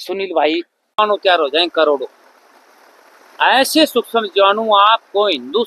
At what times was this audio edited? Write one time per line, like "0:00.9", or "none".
0:01.0